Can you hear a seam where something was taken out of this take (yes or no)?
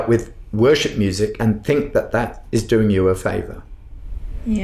yes